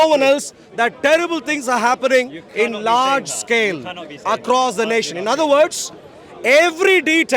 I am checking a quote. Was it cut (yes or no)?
no